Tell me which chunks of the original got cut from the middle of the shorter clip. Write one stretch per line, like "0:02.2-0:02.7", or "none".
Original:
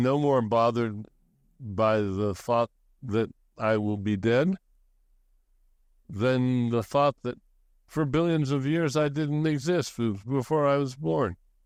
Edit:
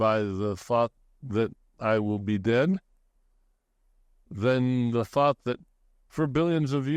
none